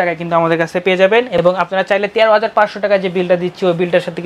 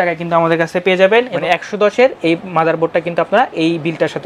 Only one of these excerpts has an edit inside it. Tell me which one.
second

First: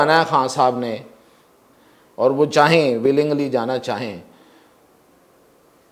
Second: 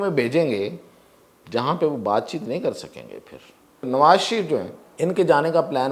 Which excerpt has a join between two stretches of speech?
second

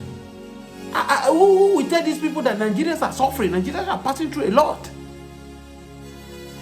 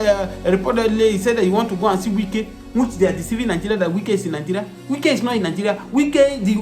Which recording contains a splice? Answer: first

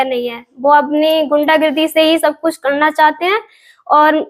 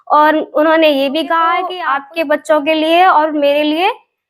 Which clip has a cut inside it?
second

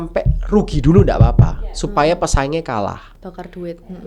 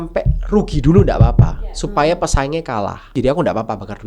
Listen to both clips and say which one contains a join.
second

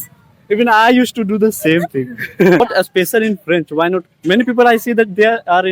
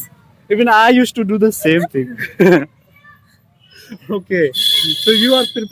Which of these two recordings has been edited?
first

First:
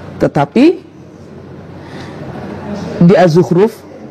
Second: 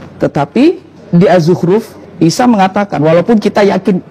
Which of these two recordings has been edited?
second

